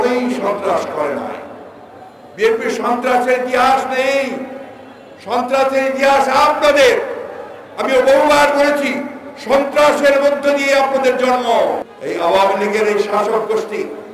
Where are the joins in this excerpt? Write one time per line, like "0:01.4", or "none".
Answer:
0:11.9